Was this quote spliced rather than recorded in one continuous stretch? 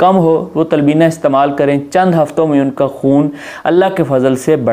no; 0 cuts

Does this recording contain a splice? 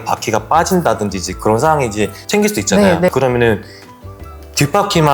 yes; 1 cut; at 3.1 s

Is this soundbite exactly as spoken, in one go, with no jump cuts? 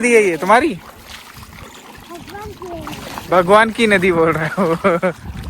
no; 1 cut; at 1.6 s

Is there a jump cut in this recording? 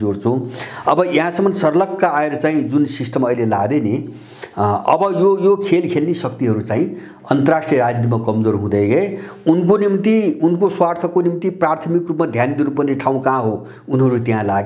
no; 0 cuts

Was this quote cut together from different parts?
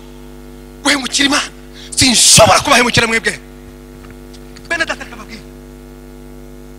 no; 0 cuts

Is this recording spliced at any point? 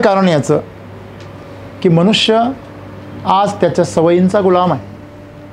no; 0 cuts

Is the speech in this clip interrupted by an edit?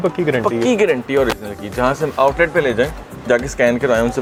no; 0 cuts

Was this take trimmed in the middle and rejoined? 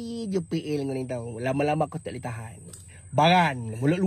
no; 0 cuts

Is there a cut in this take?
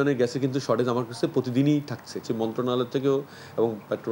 no; 0 cuts

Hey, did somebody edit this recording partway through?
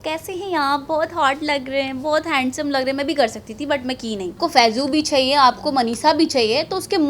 yes; 1 cut; at 4.3 s

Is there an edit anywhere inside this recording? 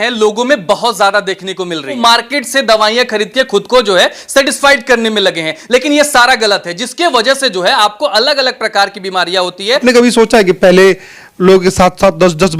yes; 2 cuts; at 2.0 s, 9.8 s

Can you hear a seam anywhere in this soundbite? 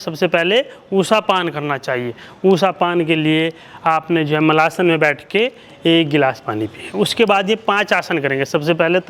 no; 0 cuts

